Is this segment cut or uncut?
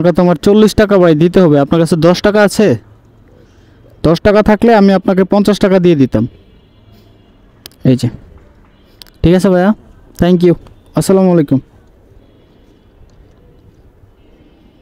uncut